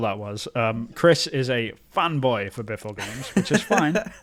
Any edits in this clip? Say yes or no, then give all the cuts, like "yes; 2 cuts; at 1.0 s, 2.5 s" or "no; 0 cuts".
no; 0 cuts